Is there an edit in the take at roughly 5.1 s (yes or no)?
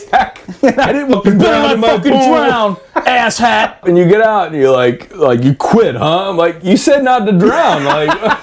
no